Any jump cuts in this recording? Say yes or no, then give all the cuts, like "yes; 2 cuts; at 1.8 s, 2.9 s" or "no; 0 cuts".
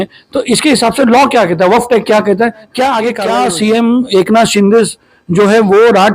yes; 1 cut; at 3.2 s